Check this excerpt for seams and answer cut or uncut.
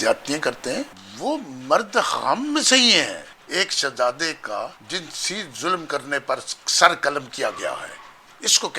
cut